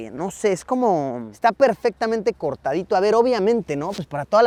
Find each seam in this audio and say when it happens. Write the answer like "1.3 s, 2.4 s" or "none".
none